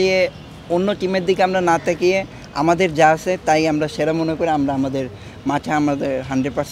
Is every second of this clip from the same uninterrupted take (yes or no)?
yes